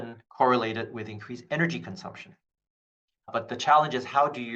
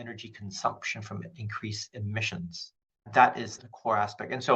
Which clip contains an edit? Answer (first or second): second